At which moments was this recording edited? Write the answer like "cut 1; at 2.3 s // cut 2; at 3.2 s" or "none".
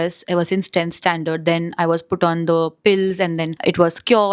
none